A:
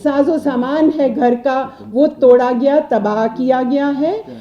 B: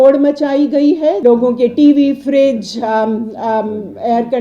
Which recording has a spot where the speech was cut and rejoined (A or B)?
B